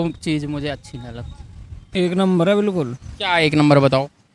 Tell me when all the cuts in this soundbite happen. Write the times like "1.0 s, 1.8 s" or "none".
1.8 s